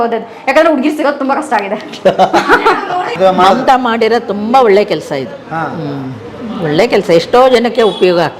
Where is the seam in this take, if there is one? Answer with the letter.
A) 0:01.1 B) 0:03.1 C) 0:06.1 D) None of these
B